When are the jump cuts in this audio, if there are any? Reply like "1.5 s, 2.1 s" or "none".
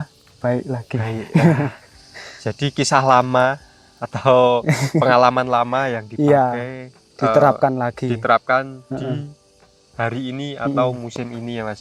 none